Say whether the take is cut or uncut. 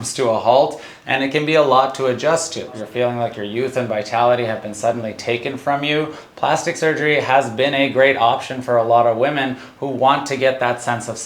cut